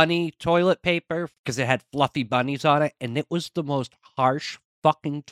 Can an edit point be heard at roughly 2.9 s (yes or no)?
no